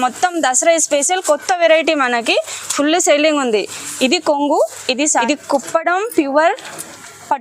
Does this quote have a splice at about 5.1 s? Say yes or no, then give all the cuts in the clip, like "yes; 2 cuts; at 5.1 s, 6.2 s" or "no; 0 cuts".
yes; 1 cut; at 5.1 s